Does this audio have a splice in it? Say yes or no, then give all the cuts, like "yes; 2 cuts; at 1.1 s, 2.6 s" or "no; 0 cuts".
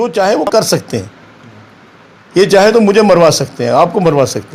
no; 0 cuts